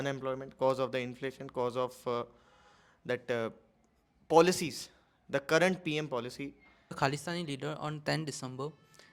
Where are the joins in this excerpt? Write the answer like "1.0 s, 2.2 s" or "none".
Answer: 7.0 s